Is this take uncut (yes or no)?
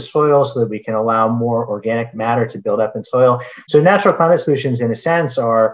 no